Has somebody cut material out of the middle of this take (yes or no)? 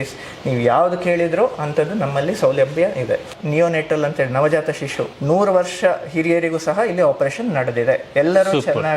yes